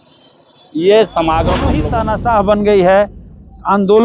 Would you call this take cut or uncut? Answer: cut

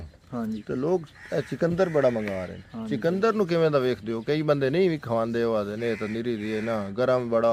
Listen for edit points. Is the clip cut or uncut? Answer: uncut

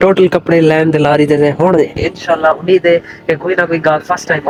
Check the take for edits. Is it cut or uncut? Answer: uncut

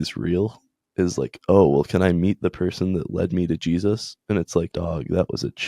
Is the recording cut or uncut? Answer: cut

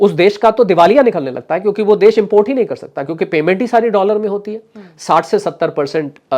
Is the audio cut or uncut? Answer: uncut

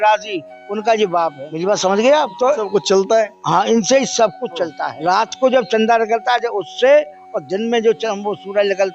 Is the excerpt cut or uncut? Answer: cut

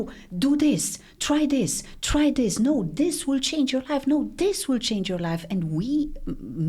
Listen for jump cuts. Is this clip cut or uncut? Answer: uncut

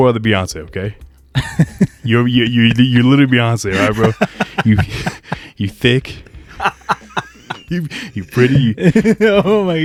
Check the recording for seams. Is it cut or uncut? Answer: uncut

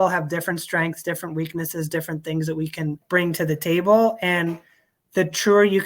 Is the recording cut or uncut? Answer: cut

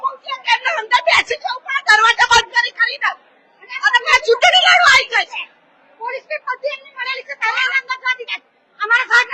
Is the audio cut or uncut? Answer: uncut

